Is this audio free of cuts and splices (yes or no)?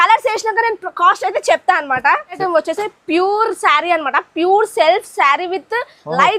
no